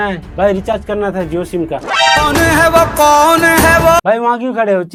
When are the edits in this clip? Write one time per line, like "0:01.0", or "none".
none